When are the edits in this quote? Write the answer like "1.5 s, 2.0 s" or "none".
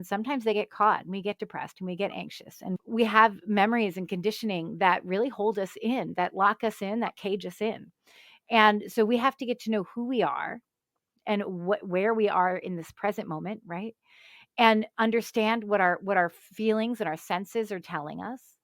2.7 s